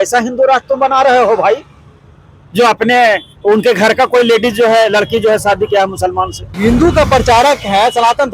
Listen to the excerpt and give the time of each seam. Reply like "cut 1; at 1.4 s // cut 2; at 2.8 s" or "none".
cut 1; at 6.6 s